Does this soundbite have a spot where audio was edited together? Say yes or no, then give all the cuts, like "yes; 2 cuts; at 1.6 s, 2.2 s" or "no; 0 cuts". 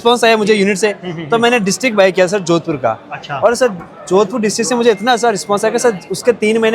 no; 0 cuts